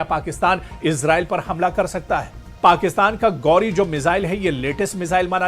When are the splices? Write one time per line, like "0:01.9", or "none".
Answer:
0:02.5